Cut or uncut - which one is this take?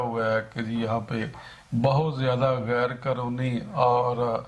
uncut